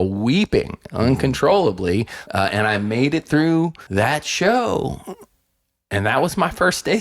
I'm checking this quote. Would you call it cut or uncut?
cut